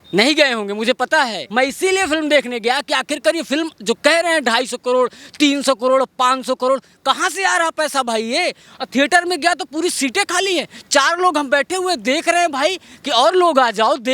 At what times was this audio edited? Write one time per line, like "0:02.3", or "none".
0:01.4